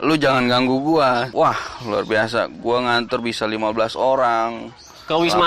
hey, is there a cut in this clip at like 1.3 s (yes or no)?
yes